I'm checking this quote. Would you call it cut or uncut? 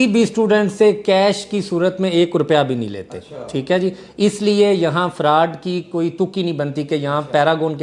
uncut